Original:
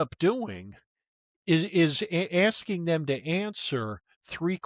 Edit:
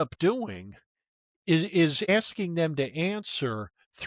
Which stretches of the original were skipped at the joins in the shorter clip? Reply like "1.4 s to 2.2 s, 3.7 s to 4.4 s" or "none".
2.1 s to 2.4 s